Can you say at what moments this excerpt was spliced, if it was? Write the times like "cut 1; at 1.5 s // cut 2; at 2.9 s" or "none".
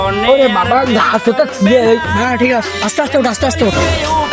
none

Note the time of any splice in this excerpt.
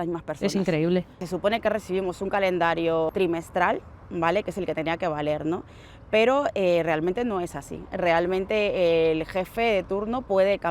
cut 1; at 1.2 s // cut 2; at 3.1 s

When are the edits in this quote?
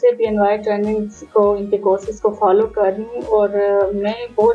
none

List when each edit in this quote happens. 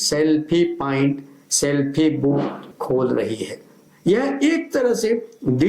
cut 1; at 2.7 s // cut 2; at 3.9 s

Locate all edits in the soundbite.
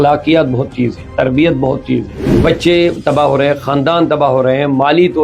cut 1; at 2.2 s

